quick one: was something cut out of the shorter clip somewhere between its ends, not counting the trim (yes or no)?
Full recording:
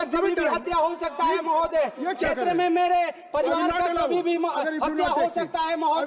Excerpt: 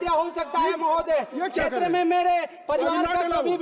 no